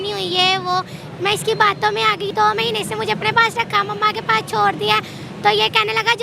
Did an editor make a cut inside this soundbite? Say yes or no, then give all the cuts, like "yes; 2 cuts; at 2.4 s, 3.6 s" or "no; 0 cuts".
yes; 1 cut; at 2.3 s